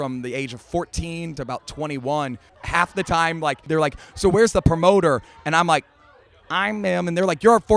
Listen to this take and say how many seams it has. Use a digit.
3